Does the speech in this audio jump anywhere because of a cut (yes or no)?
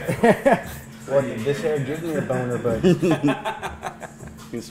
no